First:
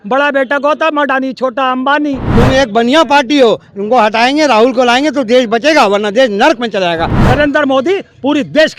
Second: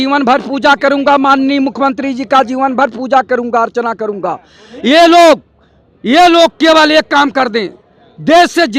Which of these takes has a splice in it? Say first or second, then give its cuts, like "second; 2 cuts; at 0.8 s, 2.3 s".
first; 2 cuts; at 2.3 s, 7.1 s